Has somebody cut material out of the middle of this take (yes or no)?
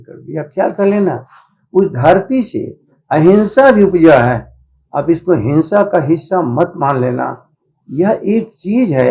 no